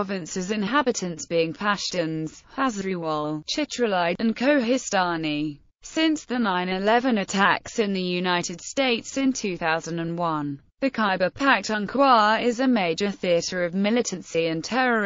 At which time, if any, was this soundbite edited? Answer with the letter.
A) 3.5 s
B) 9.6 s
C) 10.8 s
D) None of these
A